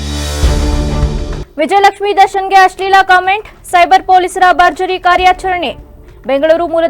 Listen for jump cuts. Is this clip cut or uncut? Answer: uncut